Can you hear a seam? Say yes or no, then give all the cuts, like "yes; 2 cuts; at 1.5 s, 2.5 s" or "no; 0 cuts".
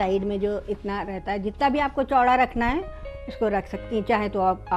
no; 0 cuts